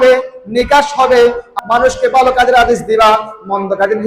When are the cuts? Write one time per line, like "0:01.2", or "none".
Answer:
0:01.5

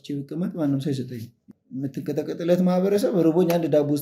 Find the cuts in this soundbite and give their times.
0:01.5

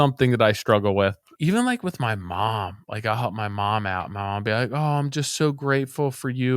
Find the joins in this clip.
0:01.3

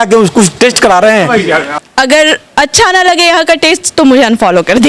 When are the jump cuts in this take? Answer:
0:01.7

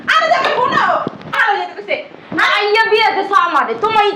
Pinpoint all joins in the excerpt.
0:01.4

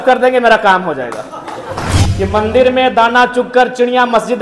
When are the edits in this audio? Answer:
0:02.0

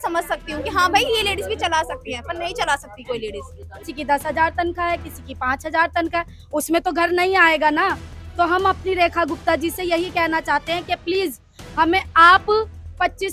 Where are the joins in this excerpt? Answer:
0:03.7

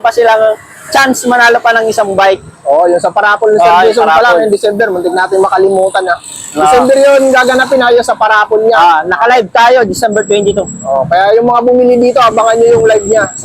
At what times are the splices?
none

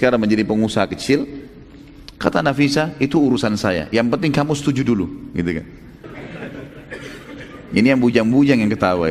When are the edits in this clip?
0:06.1

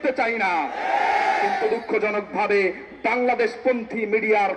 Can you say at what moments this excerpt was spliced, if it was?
none

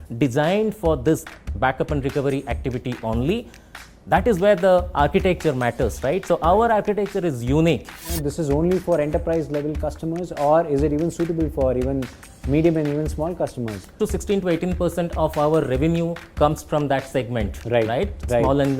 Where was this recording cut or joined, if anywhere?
0:08.2
0:13.9

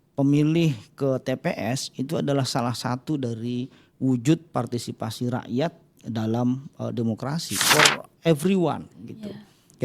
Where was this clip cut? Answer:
0:07.5

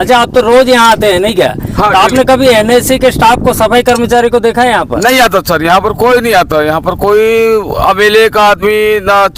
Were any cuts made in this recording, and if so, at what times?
none

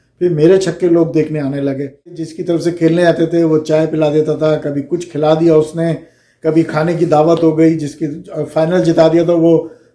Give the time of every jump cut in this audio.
0:02.3

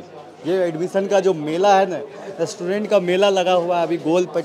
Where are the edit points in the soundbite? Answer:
none

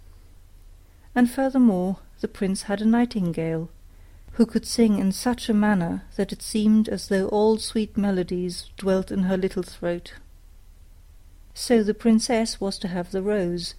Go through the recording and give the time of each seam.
none

